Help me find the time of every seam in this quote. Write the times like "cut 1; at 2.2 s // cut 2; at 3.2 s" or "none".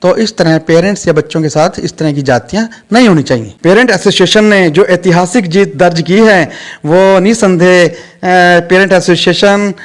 cut 1; at 3.5 s